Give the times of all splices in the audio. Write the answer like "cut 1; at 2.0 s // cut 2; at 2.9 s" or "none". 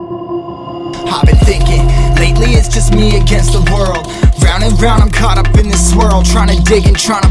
none